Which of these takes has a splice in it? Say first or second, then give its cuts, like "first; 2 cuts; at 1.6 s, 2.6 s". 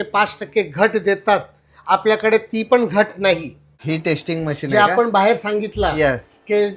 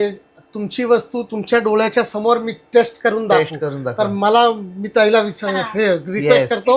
first; 1 cut; at 3.7 s